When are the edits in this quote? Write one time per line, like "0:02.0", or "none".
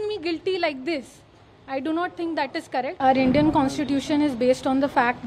0:03.0